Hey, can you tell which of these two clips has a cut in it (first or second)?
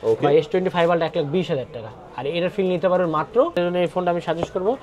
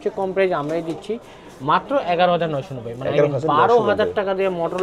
first